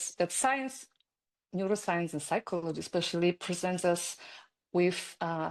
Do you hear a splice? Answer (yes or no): no